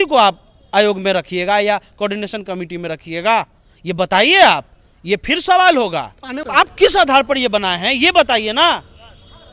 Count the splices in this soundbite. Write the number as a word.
one